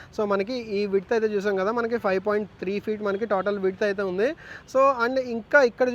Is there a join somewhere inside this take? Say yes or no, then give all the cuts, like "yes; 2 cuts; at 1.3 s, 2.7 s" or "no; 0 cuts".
no; 0 cuts